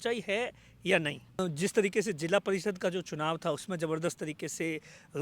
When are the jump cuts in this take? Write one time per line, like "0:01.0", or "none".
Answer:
0:01.4